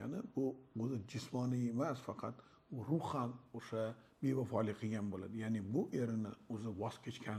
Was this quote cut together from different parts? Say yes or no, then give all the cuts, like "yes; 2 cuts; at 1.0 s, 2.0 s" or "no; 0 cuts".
no; 0 cuts